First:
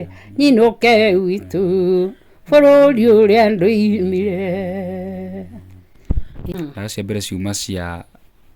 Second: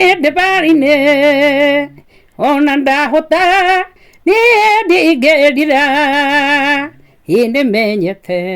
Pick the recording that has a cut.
first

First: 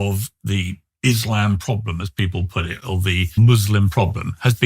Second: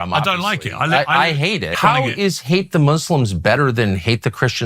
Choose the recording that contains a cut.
first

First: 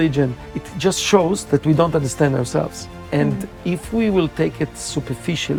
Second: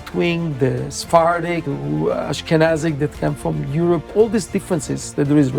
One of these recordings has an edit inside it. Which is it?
second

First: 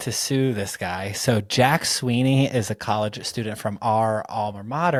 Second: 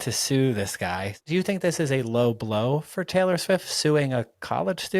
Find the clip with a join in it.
second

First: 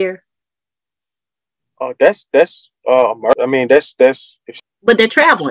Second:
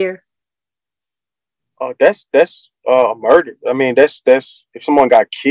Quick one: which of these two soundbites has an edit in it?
first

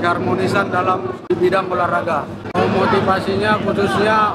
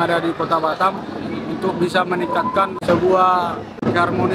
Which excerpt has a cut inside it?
first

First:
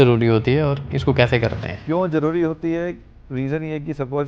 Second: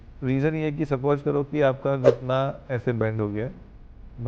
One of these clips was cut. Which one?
first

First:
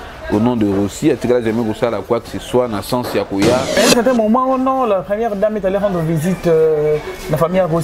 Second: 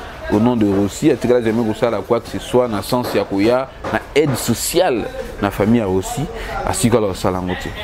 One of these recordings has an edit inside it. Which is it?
first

